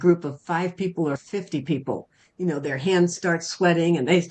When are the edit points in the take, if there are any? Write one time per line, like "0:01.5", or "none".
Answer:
none